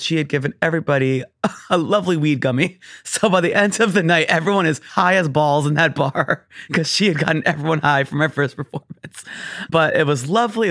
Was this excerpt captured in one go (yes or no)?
no